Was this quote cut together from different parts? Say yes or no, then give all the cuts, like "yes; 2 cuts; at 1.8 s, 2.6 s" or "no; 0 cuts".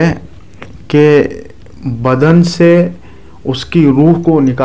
no; 0 cuts